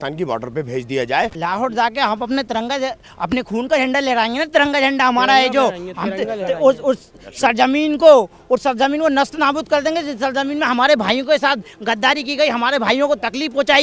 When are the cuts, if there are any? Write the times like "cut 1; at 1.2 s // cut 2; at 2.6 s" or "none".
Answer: cut 1; at 1.3 s

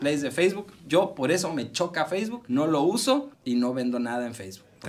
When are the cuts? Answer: cut 1; at 2.4 s // cut 2; at 3.3 s

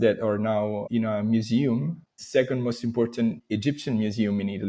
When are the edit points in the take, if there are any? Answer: cut 1; at 2.2 s

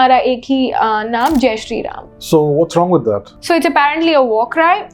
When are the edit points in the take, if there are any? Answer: cut 1; at 3.3 s

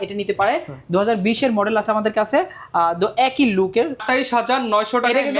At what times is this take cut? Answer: cut 1; at 4.0 s

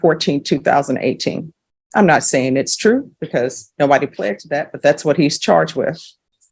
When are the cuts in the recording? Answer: none

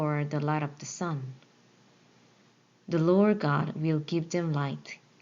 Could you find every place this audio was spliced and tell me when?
cut 1; at 2.6 s

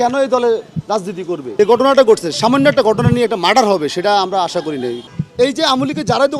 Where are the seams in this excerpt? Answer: cut 1; at 1.5 s // cut 2; at 4.9 s

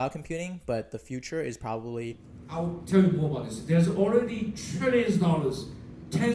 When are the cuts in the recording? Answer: cut 1; at 2.2 s

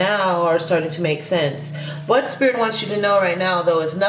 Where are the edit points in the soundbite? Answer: none

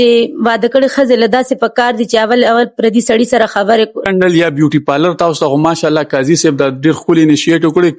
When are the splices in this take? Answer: cut 1; at 4.0 s

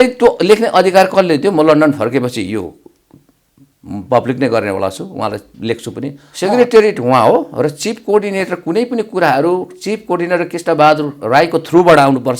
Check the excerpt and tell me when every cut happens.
cut 1; at 6.2 s

